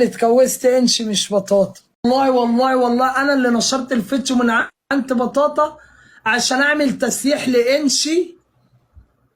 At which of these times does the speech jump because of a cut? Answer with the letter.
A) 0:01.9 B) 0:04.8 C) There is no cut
A